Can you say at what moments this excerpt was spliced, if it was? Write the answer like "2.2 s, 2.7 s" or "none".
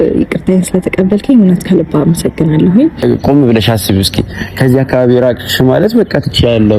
3.0 s